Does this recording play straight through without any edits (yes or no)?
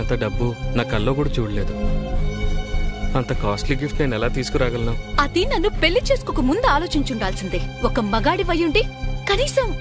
yes